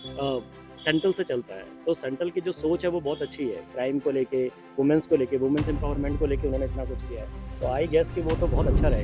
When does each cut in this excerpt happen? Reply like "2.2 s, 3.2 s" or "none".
none

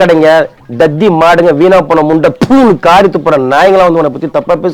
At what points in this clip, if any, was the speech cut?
none

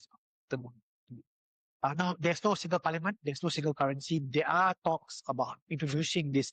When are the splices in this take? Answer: none

